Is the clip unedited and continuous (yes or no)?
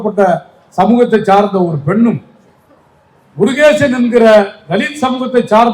yes